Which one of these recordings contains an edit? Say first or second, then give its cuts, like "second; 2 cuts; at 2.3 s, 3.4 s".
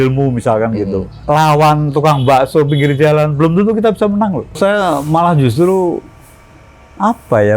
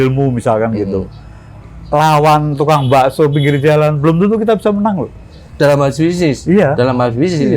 first; 2 cuts; at 1.1 s, 4.6 s